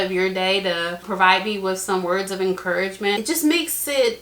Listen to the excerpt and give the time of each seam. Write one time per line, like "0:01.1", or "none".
0:01.0
0:03.2